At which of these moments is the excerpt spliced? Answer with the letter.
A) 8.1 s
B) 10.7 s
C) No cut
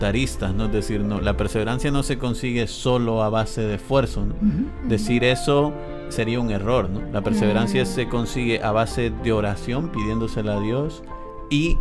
C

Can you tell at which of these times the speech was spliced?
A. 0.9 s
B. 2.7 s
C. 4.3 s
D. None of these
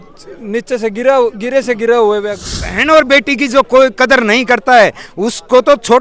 B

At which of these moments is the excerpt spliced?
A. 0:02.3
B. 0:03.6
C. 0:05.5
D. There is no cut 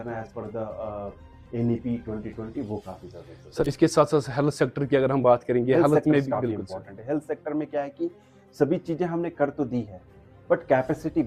B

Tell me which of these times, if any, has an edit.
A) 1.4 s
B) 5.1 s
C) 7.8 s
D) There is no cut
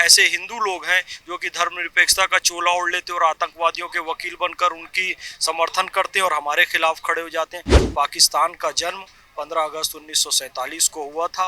C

